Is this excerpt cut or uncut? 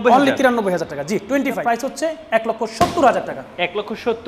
cut